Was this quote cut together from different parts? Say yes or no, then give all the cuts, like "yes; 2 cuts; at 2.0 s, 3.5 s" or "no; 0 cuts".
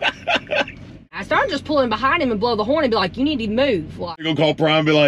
yes; 2 cuts; at 1.2 s, 4.3 s